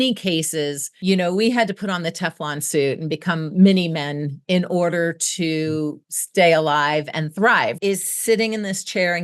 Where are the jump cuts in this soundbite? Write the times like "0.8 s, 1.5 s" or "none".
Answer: 7.8 s